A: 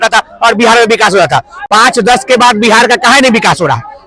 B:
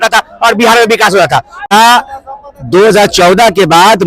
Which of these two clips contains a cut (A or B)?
B